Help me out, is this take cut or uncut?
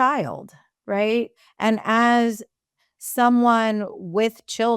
cut